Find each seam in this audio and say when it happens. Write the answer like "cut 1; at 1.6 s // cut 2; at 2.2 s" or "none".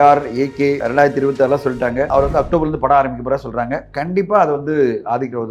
cut 1; at 0.8 s // cut 2; at 2.1 s